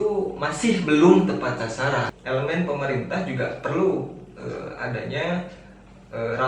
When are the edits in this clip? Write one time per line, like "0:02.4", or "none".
0:02.0